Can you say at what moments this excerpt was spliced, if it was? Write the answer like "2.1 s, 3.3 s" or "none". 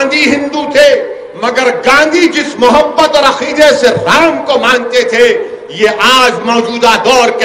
1.3 s